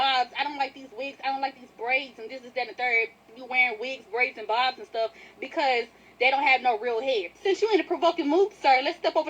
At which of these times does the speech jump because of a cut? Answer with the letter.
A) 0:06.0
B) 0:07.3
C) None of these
A